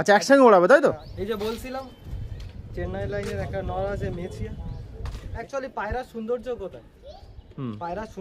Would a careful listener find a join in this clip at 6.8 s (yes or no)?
no